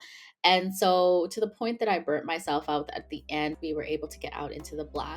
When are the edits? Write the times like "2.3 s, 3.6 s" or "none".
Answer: 3.6 s